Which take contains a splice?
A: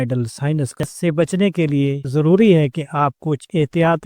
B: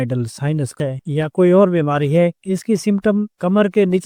A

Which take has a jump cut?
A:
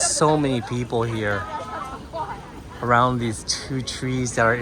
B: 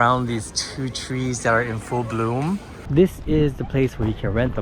B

